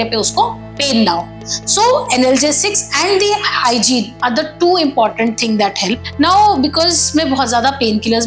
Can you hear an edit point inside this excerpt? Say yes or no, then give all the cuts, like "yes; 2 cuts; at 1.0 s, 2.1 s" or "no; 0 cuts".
yes; 1 cut; at 6.0 s